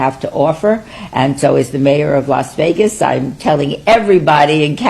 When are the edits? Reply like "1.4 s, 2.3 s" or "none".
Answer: 1.0 s